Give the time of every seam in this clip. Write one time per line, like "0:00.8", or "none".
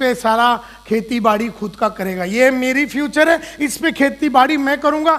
none